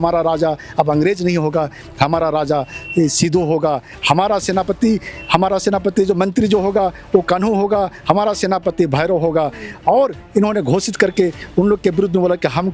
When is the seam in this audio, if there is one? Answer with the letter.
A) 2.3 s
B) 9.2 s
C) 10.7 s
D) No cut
D